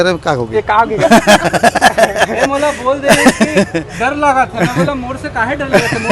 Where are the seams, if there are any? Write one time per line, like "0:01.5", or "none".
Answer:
none